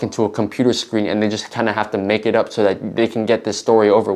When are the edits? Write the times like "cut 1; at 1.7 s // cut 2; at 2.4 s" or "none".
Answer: none